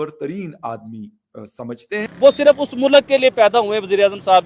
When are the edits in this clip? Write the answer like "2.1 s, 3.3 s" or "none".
2.1 s

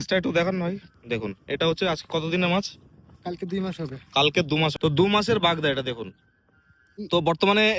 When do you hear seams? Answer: 0.9 s, 4.7 s, 6.9 s

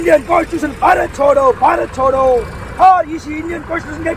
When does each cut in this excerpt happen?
none

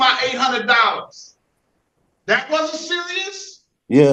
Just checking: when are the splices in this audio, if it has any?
none

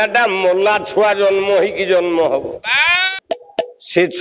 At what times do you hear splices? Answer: 3.0 s

